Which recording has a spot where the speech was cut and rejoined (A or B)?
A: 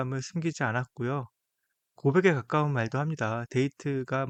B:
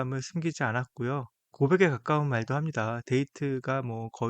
B